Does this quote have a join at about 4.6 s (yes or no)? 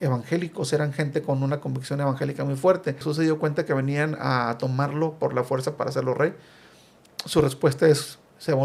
no